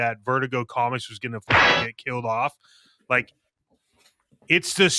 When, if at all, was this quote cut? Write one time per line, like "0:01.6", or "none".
none